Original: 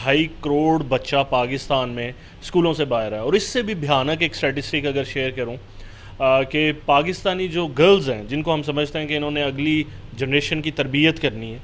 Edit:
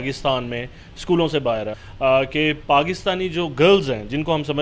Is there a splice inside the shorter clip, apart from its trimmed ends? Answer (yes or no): yes